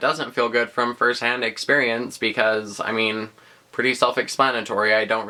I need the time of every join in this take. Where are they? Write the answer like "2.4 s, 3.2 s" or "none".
none